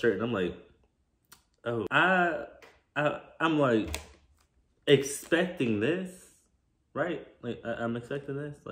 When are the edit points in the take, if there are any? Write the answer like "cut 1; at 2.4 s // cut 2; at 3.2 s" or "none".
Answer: cut 1; at 1.9 s

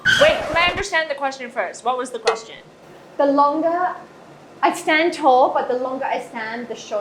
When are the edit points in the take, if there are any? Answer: none

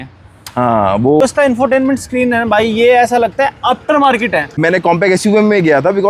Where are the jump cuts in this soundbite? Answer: cut 1; at 1.2 s // cut 2; at 4.5 s

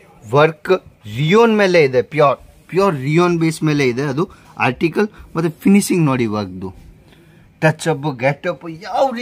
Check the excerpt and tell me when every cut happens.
none

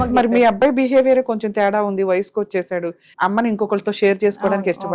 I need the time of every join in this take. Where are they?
cut 1; at 3.0 s

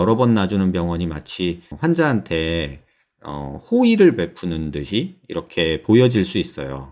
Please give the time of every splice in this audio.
cut 1; at 1.7 s

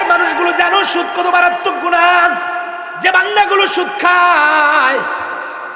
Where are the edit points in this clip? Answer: cut 1; at 2.8 s

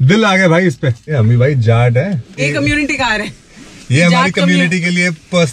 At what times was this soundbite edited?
cut 1; at 1.1 s // cut 2; at 2.4 s

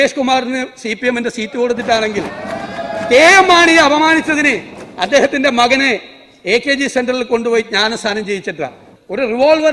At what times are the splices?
cut 1; at 8.8 s

